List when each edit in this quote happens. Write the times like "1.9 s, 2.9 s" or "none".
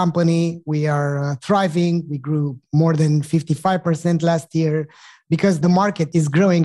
5.6 s